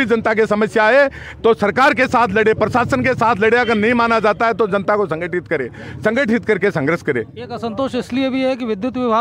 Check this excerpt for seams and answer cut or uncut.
uncut